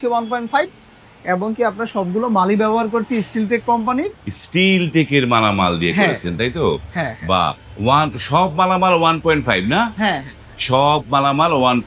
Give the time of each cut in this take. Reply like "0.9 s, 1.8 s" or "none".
none